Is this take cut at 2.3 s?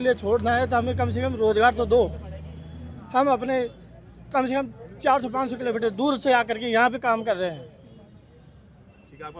no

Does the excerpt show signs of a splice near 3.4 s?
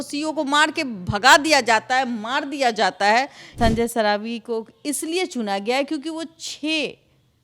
yes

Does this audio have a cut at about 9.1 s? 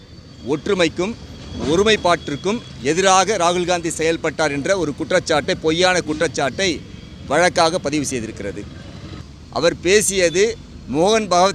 yes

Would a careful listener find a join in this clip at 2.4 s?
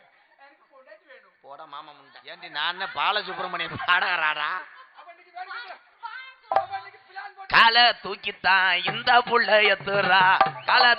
yes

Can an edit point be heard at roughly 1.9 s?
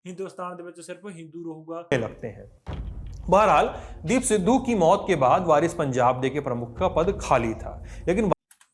yes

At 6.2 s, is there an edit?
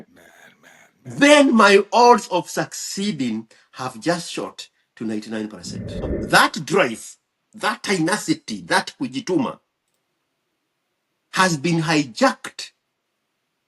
yes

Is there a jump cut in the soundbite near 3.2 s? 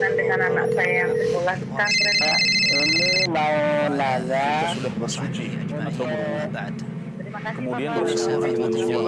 no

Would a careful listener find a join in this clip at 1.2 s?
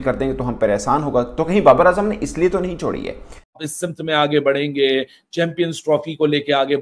no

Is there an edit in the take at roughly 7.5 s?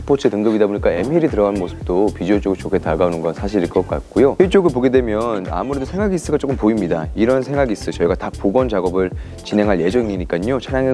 no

